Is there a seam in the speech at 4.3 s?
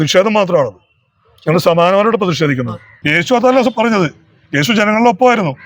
no; 1 cut; at 2.9 s

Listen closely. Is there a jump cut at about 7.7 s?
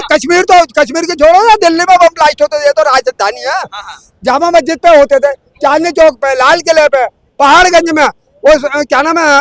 no; 0 cuts

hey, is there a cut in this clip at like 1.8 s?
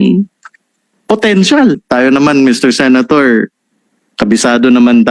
yes; 1 cut; at 1.8 s

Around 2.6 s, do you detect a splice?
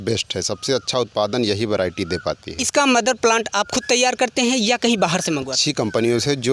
yes; 2 cuts; at 2.6 s, 5.6 s

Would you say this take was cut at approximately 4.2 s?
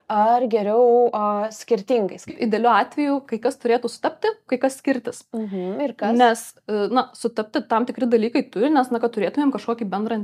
no; 1 cut; at 2.4 s

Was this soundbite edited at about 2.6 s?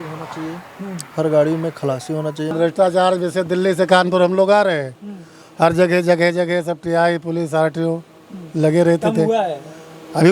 yes; 1 cut; at 2.6 s

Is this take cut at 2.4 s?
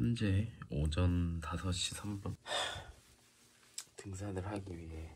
yes; 1 cut; at 2.4 s

